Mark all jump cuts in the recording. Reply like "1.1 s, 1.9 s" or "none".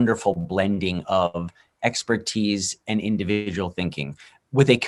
none